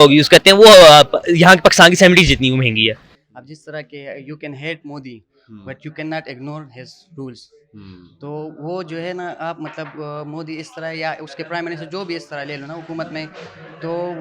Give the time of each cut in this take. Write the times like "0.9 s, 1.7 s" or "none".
3.0 s